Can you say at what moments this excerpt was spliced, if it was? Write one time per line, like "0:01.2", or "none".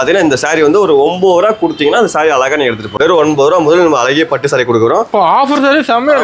0:02.8